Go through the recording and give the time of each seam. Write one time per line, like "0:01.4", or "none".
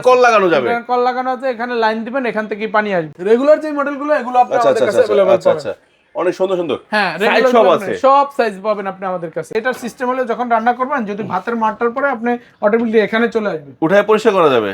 0:03.1
0:09.5